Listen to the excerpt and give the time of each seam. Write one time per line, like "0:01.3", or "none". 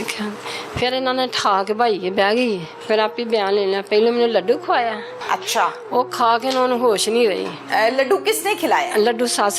0:02.7
0:05.1
0:07.5